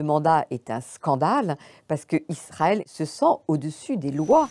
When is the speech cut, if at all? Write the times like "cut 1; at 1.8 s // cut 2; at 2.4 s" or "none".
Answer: cut 1; at 2.8 s